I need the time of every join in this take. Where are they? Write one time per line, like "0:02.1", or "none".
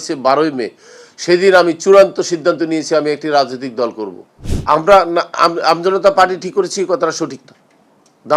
0:04.3